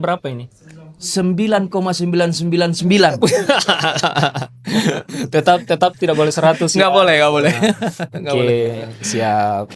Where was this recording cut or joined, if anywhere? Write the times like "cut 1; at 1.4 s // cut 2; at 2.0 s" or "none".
none